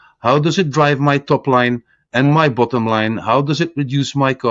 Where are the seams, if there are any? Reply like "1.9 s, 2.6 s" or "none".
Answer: none